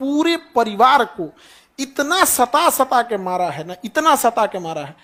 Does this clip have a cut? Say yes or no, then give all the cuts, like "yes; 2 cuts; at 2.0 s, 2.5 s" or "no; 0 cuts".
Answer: no; 0 cuts